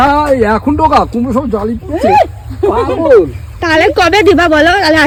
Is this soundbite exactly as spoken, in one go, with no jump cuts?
yes; 0 cuts

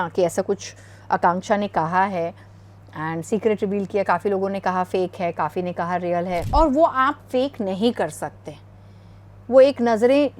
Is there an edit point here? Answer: yes; 1 cut; at 6.5 s

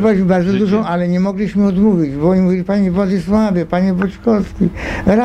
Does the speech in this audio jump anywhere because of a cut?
no; 0 cuts

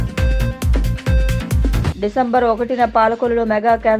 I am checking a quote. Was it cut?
yes; 1 cut; at 1.9 s

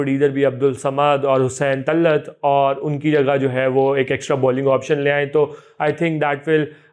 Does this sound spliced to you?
no; 0 cuts

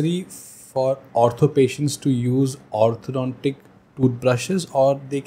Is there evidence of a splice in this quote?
no; 0 cuts

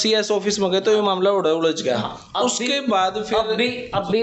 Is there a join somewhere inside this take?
no; 0 cuts

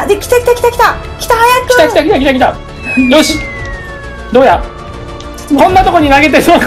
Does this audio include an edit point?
yes; 1 cut; at 2.5 s

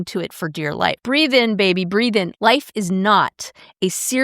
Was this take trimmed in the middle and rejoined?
yes; 2 cuts; at 1.0 s, 2.3 s

